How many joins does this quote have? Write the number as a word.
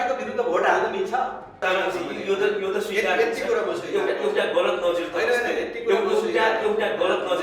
one